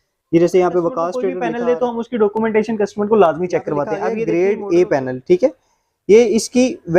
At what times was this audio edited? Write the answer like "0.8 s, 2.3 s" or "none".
1.3 s, 4.1 s